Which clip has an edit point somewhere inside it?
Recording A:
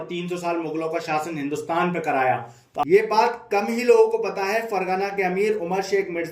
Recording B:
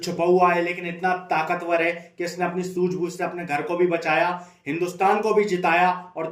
A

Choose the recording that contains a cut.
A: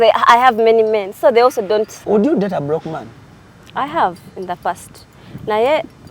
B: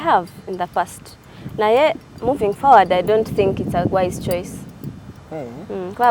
A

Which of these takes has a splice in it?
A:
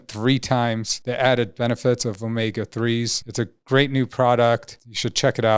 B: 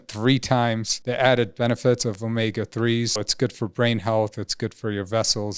B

